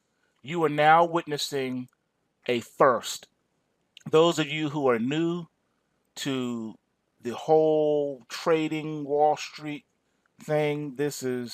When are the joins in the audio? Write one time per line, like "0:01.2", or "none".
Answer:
0:04.3